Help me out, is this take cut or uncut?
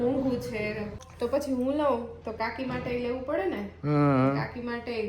cut